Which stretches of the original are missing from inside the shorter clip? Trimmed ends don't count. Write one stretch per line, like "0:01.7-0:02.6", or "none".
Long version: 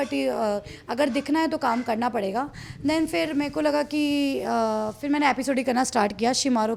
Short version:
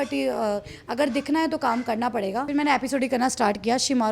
0:02.5-0:05.0